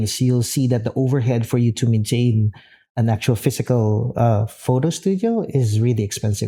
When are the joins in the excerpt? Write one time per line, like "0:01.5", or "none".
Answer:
none